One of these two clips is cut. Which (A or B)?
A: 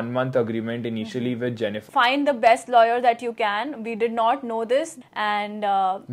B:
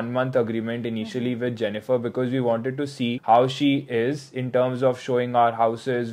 A